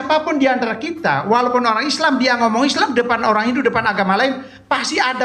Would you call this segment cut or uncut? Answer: uncut